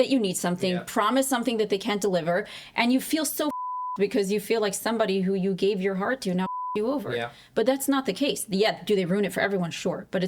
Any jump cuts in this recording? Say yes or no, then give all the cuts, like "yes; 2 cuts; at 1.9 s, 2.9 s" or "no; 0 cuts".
no; 0 cuts